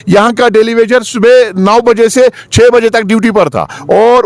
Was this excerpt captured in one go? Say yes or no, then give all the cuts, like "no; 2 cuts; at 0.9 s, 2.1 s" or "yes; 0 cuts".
yes; 0 cuts